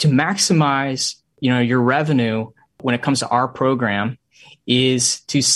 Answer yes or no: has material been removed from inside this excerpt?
yes